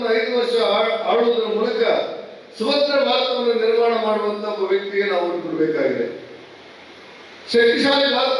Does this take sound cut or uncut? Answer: uncut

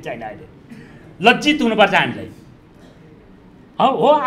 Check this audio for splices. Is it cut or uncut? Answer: uncut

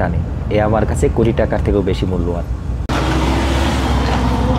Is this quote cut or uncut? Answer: uncut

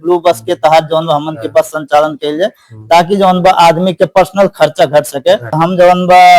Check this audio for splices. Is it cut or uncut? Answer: cut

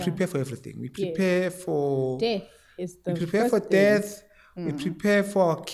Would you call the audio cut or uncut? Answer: uncut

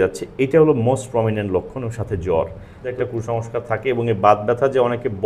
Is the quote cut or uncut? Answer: cut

